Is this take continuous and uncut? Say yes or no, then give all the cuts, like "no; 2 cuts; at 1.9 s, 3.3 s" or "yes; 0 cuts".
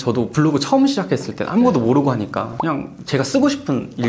yes; 0 cuts